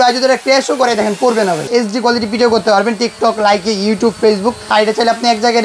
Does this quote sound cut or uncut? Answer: cut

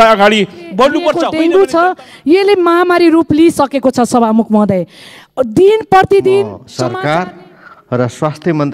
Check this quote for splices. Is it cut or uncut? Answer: cut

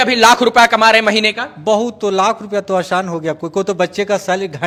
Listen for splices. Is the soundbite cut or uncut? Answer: uncut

